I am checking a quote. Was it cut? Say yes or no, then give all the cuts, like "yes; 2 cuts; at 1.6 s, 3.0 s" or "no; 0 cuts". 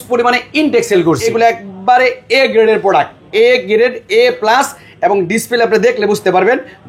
yes; 1 cut; at 1.2 s